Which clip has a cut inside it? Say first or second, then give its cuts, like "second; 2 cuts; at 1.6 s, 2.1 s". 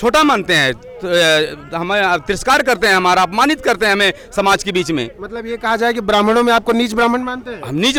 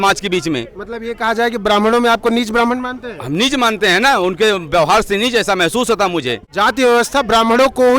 second; 1 cut; at 6.4 s